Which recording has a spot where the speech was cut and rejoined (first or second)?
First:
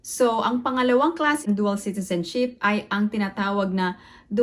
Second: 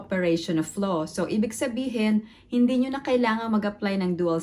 first